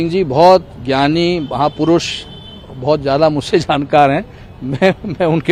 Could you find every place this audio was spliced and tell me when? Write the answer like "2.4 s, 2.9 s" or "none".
none